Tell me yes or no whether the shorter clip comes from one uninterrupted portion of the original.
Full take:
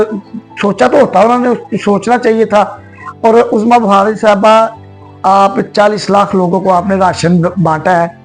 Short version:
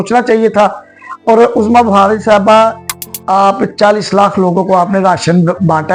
yes